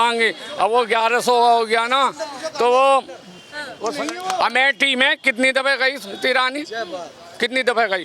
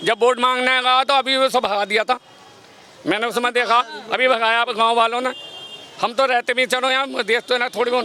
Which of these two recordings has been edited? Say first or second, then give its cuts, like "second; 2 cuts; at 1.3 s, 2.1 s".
first; 1 cut; at 3.8 s